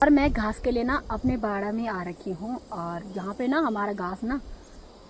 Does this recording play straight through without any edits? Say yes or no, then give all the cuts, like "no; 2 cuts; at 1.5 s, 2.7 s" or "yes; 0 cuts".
yes; 0 cuts